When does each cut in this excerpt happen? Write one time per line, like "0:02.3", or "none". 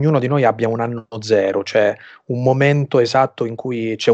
none